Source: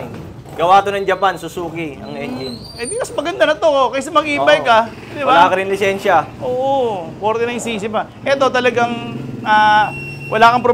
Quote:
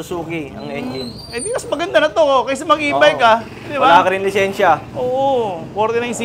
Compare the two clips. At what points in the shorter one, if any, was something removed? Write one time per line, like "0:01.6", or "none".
none